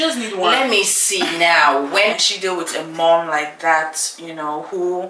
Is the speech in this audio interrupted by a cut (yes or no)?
yes